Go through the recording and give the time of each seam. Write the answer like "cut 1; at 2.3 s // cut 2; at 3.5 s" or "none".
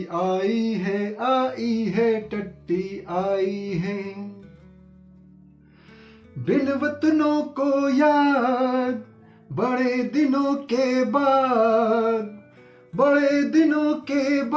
none